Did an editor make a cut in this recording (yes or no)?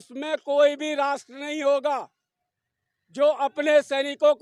no